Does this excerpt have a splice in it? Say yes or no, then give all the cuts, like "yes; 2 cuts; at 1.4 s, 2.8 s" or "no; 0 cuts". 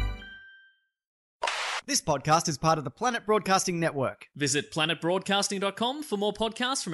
yes; 1 cut; at 1.6 s